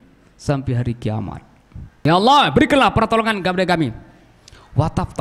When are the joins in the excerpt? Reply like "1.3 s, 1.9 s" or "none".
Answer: 1.9 s